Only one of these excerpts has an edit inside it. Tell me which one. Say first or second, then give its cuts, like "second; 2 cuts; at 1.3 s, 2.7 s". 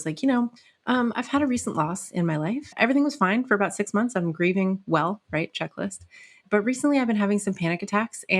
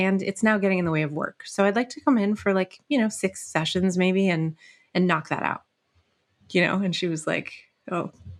first; 2 cuts; at 2.7 s, 6.4 s